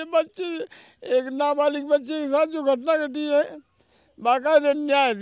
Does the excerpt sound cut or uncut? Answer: uncut